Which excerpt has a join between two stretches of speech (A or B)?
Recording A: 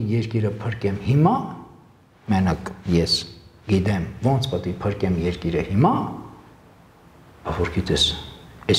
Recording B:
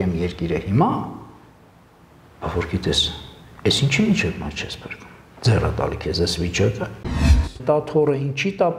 B